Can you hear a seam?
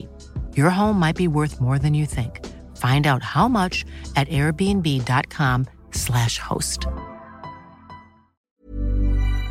yes; 1 cut; at 8.4 s

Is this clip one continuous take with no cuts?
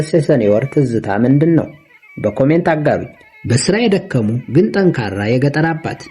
yes; 0 cuts

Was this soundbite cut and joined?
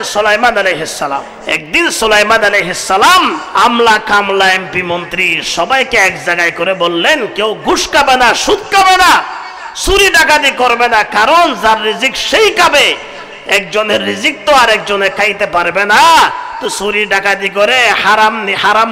yes; 2 cuts; at 1.4 s, 3.4 s

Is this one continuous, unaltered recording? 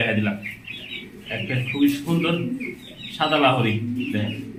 yes; 0 cuts

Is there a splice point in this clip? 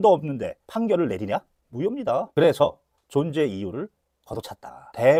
no; 0 cuts

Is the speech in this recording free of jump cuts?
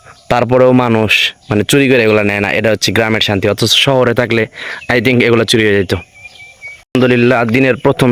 yes; 0 cuts

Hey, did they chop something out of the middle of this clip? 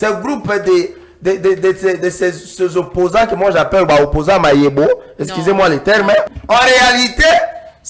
yes; 1 cut; at 6.4 s

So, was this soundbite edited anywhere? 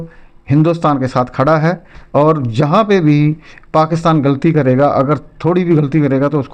no; 0 cuts

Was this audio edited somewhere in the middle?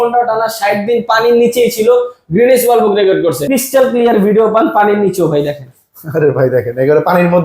yes; 1 cut; at 3.4 s

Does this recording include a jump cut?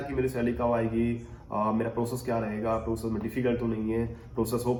no; 0 cuts

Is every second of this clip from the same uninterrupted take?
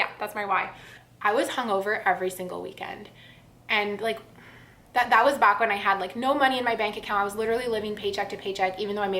no; 1 cut; at 1.0 s

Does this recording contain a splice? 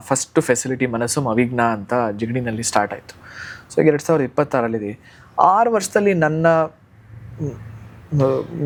no; 0 cuts

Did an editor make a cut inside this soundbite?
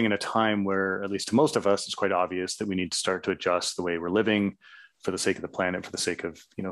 no; 0 cuts

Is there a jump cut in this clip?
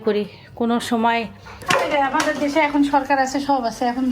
yes; 1 cut; at 1.6 s

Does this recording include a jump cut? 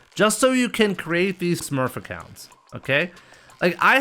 yes; 1 cut; at 1.6 s

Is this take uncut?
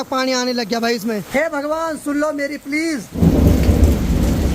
no; 2 cuts; at 1.3 s, 3.2 s

